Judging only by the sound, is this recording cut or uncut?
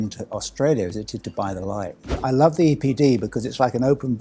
cut